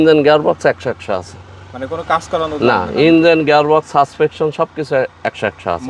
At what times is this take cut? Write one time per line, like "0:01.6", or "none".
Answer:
none